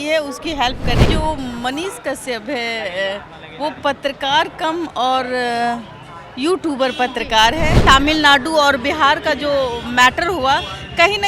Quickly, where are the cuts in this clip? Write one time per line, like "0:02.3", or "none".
0:01.1
0:07.8